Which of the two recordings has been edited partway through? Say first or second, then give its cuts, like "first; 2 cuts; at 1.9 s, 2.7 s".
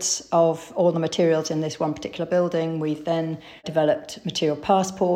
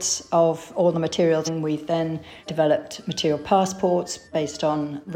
second; 2 cuts; at 1.5 s, 4.3 s